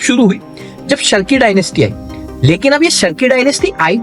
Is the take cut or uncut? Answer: uncut